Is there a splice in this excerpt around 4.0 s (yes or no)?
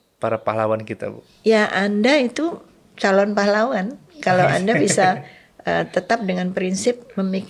no